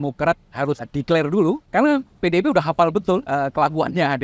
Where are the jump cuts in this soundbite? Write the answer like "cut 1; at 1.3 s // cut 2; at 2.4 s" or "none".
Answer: cut 1; at 0.9 s // cut 2; at 1.6 s // cut 3; at 3.2 s

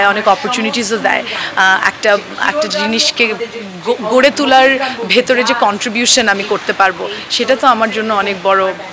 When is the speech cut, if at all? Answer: none

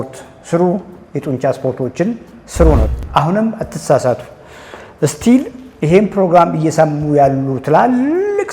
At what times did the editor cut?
cut 1; at 2.9 s

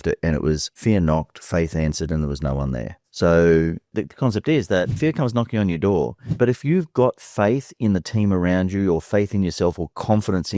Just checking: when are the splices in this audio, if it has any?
cut 1; at 0.8 s // cut 2; at 3.9 s // cut 3; at 5.0 s

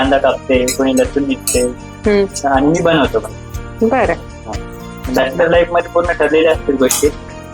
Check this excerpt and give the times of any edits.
none

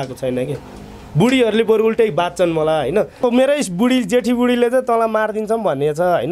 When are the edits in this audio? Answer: cut 1; at 3.2 s

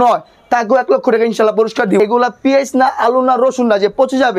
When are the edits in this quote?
cut 1; at 2.0 s

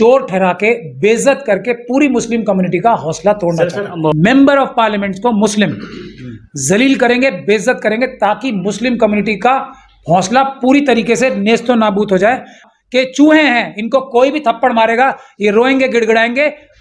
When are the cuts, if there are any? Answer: cut 1; at 4.1 s // cut 2; at 12.6 s

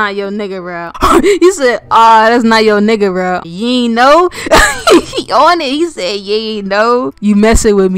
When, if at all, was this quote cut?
none

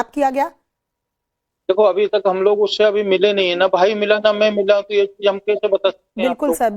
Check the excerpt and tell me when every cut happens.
cut 1; at 3.7 s

